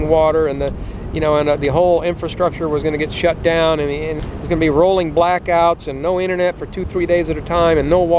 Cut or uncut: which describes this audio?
uncut